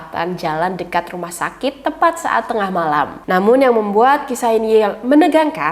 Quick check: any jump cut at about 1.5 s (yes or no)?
no